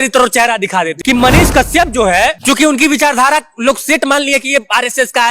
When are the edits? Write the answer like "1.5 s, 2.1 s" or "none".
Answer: 0.9 s, 2.4 s

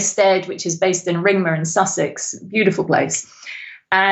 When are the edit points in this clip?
none

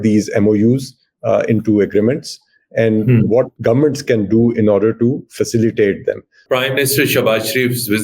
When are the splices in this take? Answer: 3.5 s, 6.3 s

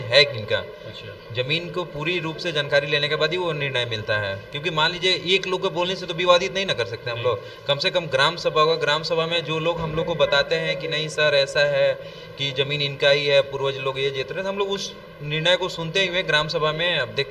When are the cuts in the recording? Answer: none

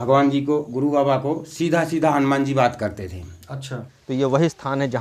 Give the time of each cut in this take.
4.0 s

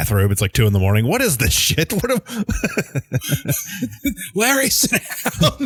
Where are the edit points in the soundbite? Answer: none

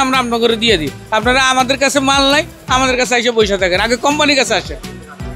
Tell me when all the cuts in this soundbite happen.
none

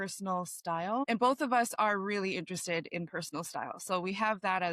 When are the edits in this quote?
1.0 s

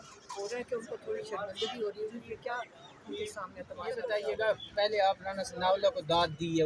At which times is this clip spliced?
3.9 s

